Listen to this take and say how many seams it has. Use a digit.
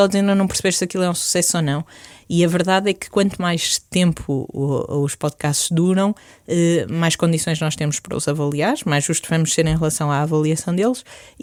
0